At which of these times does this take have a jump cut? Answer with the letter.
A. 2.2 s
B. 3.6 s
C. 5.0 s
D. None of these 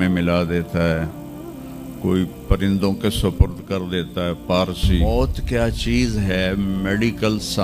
C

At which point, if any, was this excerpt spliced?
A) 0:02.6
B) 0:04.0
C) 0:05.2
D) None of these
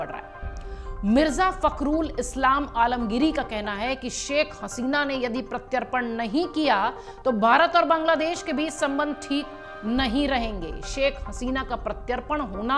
D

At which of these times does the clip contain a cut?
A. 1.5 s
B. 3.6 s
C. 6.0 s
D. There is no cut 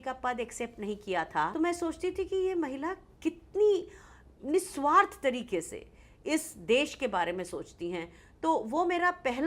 A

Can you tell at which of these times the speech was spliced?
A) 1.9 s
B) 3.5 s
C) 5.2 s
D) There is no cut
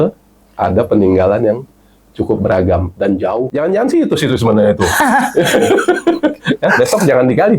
B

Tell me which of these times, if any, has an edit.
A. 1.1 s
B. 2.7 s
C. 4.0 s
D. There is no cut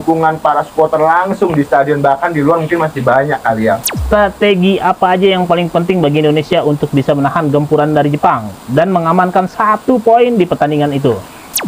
C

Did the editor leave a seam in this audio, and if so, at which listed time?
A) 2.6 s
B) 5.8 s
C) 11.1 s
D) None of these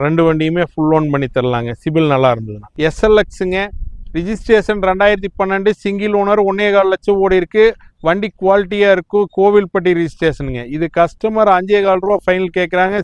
A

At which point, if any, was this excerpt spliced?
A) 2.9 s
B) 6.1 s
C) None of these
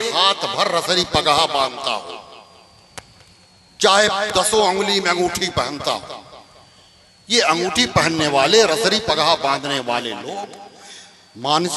C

